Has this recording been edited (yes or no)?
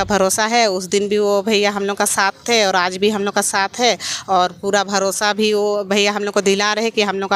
no